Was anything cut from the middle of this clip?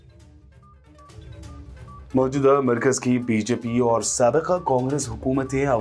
no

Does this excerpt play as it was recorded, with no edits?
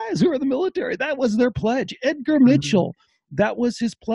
yes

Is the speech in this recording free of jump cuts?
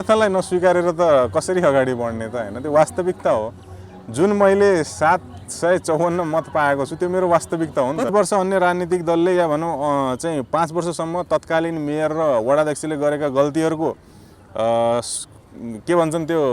no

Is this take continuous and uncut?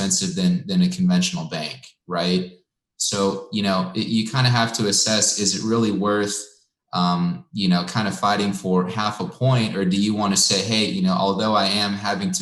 yes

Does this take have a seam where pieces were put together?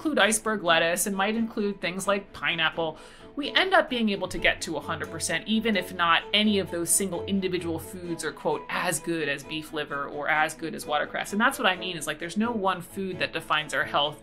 no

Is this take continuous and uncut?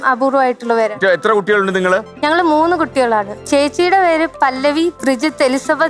yes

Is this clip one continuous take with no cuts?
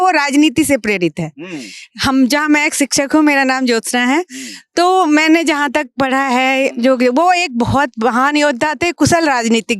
yes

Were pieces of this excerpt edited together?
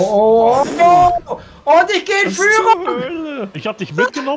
no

